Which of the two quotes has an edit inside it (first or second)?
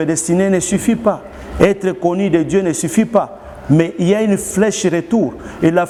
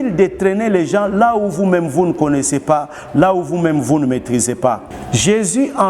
second